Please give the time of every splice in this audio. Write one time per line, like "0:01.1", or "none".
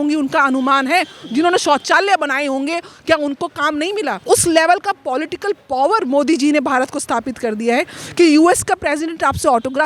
0:04.2